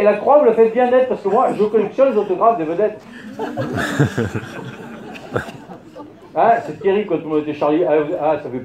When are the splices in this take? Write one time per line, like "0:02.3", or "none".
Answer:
0:01.2